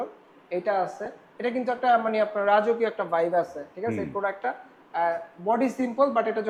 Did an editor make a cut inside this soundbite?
no; 0 cuts

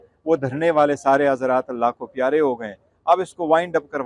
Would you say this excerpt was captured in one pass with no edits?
yes; 0 cuts

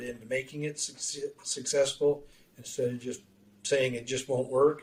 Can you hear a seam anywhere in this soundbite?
no; 0 cuts

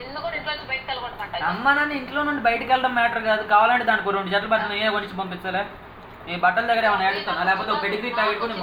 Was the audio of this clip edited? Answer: no; 0 cuts

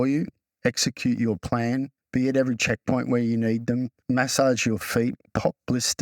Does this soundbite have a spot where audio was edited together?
yes; 3 cuts; at 2.0 s, 4.0 s, 5.2 s

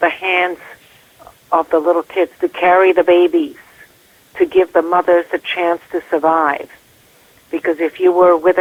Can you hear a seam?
no; 0 cuts

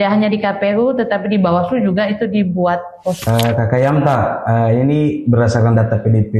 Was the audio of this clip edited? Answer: yes; 1 cut; at 3.2 s

